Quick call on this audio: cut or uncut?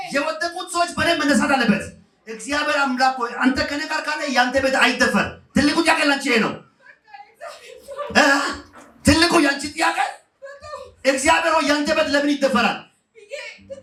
uncut